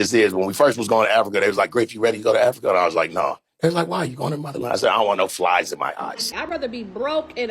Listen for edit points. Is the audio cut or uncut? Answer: cut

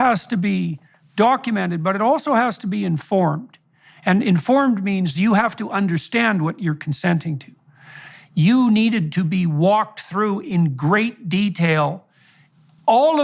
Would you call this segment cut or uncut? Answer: cut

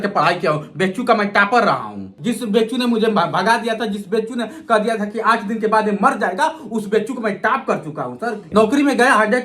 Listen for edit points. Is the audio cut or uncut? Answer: cut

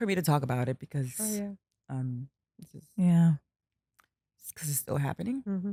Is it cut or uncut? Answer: uncut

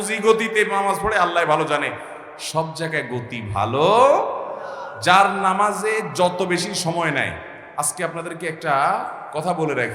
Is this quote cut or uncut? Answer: uncut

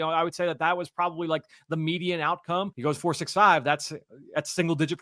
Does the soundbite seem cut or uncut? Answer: cut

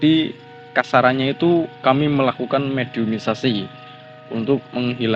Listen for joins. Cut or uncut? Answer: uncut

